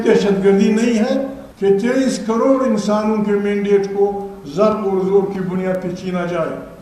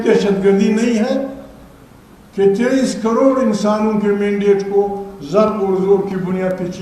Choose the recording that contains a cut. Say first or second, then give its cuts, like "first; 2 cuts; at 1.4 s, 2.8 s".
first; 1 cut; at 1.4 s